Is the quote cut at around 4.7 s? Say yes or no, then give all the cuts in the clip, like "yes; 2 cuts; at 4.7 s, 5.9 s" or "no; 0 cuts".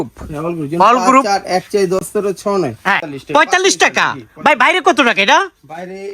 no; 1 cut; at 3.1 s